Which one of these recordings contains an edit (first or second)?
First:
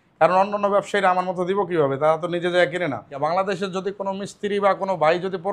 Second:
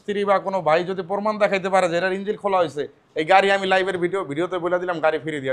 first